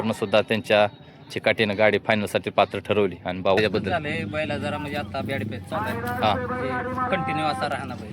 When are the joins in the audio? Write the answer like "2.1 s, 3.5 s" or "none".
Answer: 3.6 s